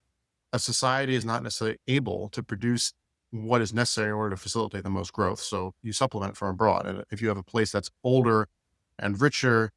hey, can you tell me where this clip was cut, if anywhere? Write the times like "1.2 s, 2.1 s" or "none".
1.8 s, 3.3 s, 9.0 s